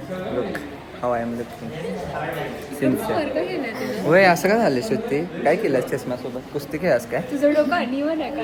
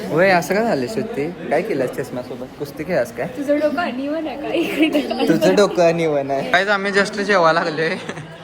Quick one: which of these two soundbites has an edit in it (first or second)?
second